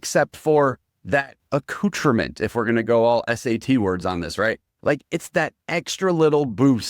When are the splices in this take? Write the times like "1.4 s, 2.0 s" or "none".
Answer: 1.4 s

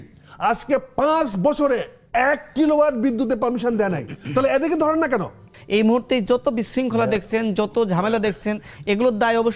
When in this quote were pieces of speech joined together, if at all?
5.5 s

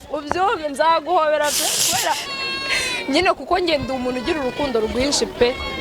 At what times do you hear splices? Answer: 2.3 s

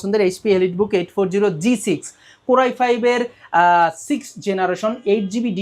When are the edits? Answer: none

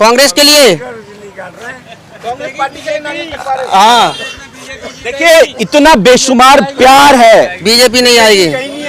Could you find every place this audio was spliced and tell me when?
7.6 s

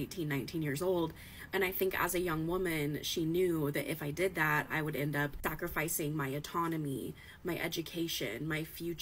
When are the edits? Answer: 2.9 s

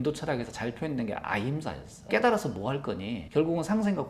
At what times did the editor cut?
1.9 s

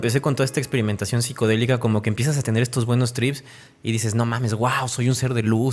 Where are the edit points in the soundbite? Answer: none

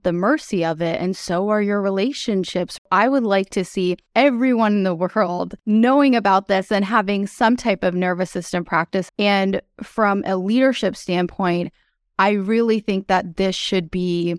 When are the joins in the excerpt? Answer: 2.8 s, 4.0 s, 5.6 s, 9.1 s

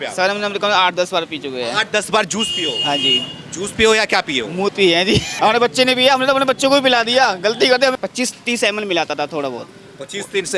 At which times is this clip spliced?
5.3 s, 8.0 s

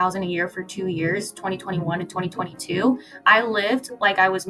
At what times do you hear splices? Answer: none

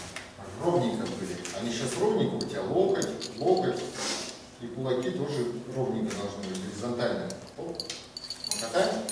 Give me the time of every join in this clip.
none

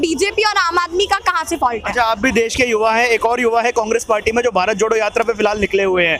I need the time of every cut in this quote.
none

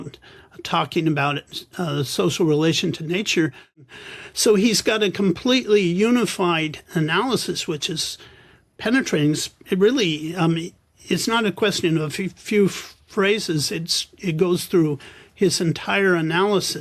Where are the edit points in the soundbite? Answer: 3.8 s

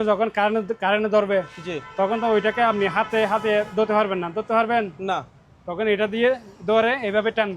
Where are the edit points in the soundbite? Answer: none

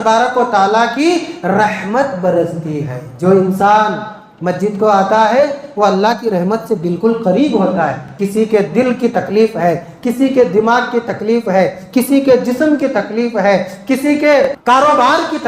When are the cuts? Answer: 8.1 s, 14.5 s

